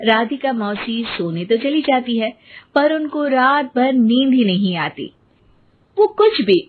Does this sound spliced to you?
no; 0 cuts

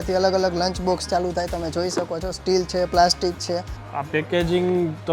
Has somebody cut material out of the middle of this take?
yes; 1 cut; at 3.7 s

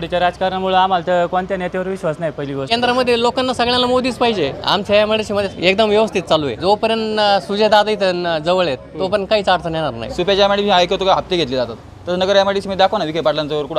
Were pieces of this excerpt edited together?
yes; 5 cuts; at 2.7 s, 4.6 s, 5.5 s, 6.5 s, 10.0 s

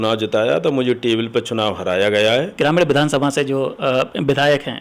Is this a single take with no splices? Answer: no; 1 cut; at 2.5 s

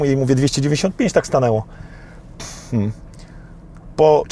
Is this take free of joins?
yes; 0 cuts

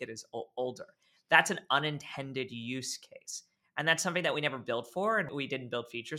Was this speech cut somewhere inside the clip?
yes; 1 cut; at 5.3 s

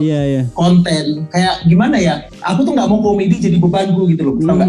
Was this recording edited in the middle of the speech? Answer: yes; 1 cut; at 2.3 s

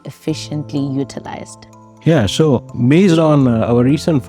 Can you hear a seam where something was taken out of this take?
yes; 1 cut; at 2.7 s

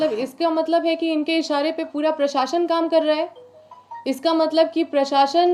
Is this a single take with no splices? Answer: yes; 0 cuts

